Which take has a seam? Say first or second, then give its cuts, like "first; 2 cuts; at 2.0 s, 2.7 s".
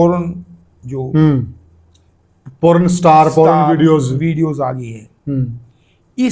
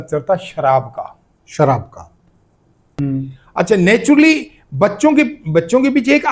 second; 1 cut; at 2.8 s